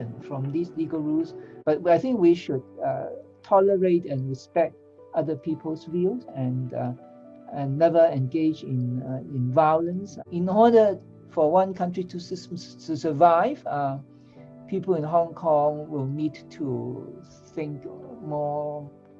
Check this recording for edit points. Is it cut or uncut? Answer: cut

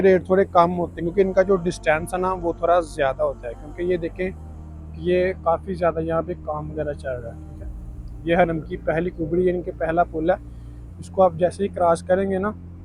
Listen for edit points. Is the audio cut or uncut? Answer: uncut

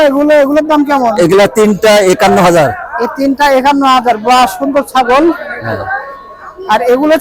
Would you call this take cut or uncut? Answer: uncut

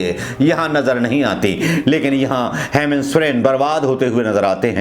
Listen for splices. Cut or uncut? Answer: uncut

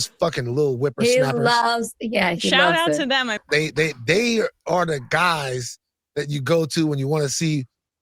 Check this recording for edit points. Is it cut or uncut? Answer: cut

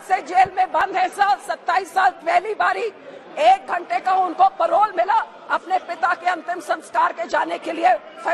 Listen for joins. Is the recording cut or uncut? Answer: uncut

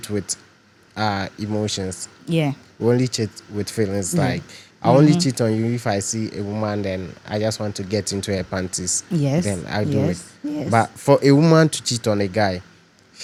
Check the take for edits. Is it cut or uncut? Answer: uncut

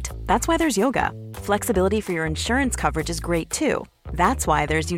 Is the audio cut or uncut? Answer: uncut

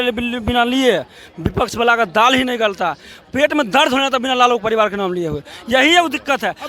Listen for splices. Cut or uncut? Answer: uncut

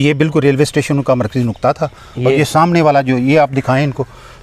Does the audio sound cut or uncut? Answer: uncut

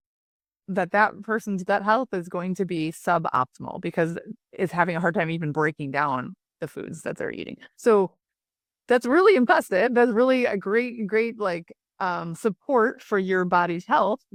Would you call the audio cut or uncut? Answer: uncut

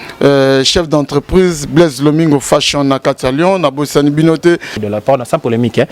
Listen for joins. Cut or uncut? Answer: cut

